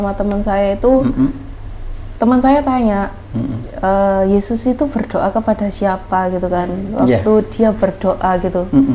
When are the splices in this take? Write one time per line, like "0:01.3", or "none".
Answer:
none